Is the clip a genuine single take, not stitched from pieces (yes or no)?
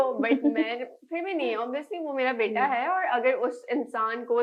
yes